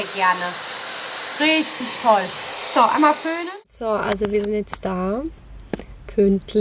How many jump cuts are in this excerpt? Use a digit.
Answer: 1